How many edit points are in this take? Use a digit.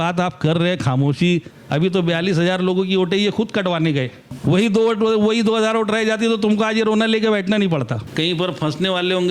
3